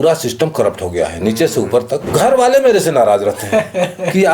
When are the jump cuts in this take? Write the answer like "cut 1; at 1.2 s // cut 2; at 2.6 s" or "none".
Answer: cut 1; at 2.1 s